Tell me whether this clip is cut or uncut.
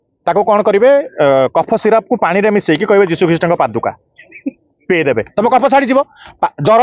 uncut